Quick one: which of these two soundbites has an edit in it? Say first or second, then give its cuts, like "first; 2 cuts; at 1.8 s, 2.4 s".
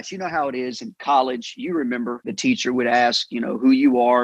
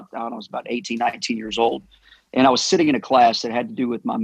first; 1 cut; at 2.3 s